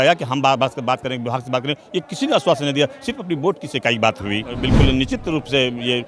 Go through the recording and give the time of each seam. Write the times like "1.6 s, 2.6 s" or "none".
4.5 s

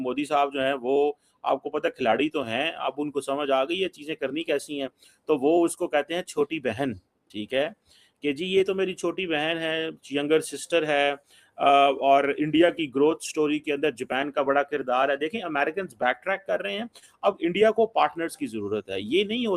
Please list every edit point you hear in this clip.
none

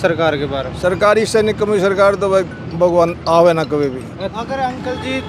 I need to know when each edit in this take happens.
4.3 s

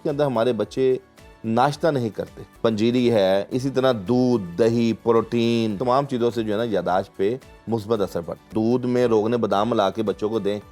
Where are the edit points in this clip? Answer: 2.4 s, 5.8 s, 8.5 s

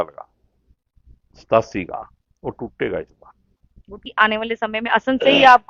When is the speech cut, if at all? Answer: 4.0 s

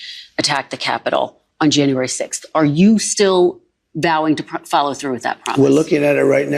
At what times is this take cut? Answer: none

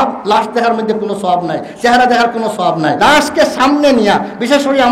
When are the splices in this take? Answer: 3.0 s

